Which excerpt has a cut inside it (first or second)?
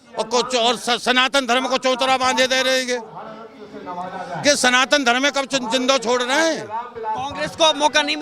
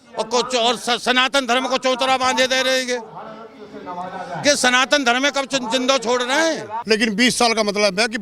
second